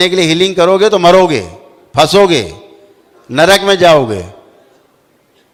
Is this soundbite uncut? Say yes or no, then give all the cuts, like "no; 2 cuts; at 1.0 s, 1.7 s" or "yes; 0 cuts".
yes; 0 cuts